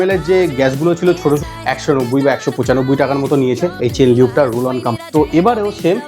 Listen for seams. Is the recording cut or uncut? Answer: cut